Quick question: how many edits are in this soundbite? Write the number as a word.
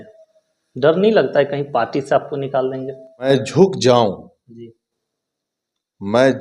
one